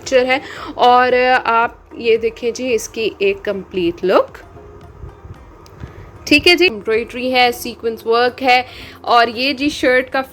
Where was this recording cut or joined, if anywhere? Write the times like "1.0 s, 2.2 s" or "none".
6.8 s